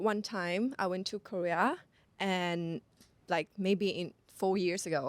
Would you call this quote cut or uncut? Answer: uncut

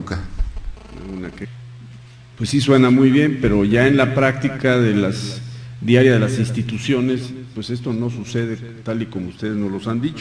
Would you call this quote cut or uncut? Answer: uncut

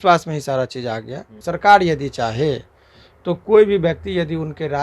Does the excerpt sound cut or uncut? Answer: cut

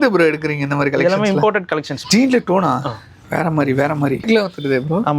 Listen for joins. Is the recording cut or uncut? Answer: cut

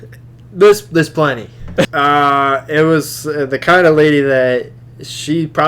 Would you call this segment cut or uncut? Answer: cut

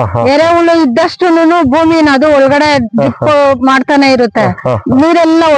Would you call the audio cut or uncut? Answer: uncut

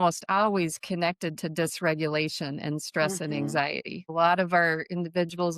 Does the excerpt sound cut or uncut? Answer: cut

